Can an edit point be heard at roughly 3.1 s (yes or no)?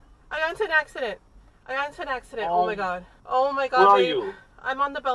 yes